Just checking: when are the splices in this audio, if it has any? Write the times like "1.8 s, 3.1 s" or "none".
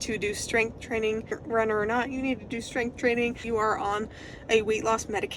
1.4 s, 3.4 s